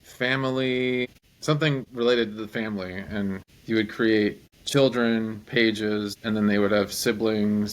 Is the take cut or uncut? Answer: cut